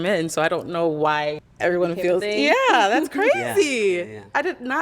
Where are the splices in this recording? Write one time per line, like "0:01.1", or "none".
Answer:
0:01.5
0:02.6